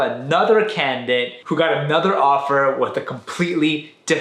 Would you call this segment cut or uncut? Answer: uncut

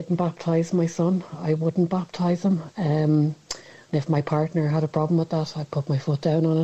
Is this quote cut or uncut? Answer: uncut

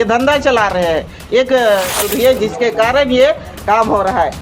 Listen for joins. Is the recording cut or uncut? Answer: cut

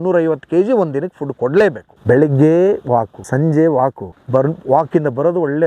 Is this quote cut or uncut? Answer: cut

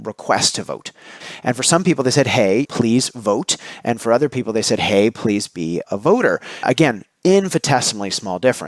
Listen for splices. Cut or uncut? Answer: cut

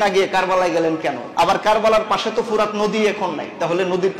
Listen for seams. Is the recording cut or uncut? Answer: cut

